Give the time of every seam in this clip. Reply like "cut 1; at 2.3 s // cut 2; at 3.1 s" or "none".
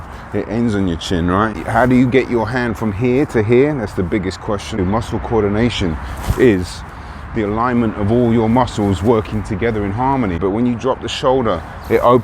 cut 1; at 1.5 s // cut 2; at 4.8 s // cut 3; at 10.4 s

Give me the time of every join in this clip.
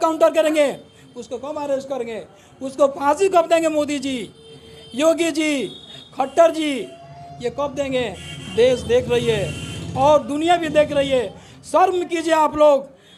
none

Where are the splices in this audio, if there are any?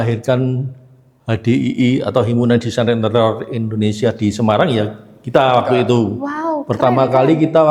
none

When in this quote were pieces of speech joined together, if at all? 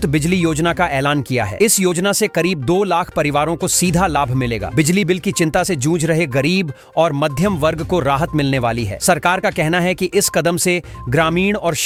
none

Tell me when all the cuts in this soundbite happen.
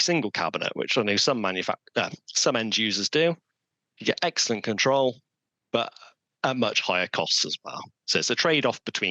none

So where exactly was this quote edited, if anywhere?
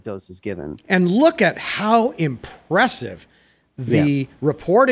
none

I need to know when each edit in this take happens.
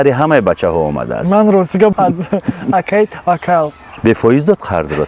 cut 1; at 1.9 s // cut 2; at 3.9 s

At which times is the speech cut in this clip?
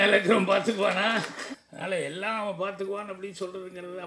cut 1; at 1.4 s

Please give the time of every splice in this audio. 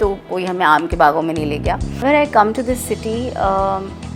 cut 1; at 2.0 s

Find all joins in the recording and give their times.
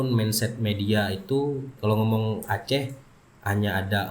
cut 1; at 1.7 s

